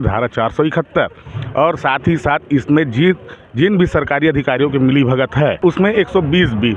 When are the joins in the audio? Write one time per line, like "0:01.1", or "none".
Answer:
0:05.6